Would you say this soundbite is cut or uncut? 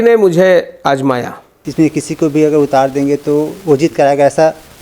cut